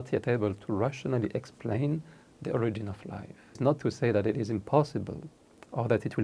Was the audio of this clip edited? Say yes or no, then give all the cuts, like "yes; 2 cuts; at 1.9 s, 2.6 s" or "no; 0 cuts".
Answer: yes; 1 cut; at 3.6 s